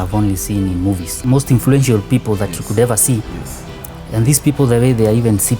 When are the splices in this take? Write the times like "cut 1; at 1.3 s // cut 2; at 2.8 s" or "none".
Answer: cut 1; at 1.1 s